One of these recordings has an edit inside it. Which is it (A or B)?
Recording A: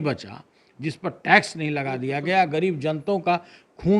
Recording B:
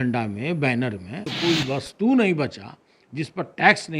B